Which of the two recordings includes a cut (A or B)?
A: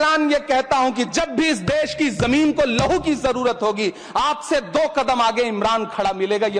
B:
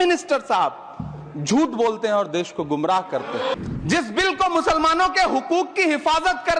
B